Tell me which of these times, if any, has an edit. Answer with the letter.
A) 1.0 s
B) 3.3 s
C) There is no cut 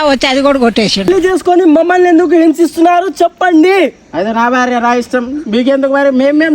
A